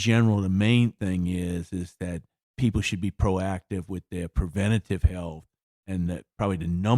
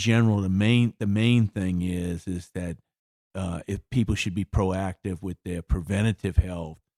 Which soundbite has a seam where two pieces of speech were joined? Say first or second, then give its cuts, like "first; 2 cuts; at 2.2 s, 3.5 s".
first; 2 cuts; at 1.0 s, 2.5 s